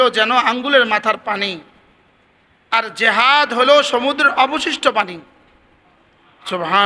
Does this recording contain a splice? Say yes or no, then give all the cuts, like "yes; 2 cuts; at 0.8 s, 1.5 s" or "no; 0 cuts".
no; 0 cuts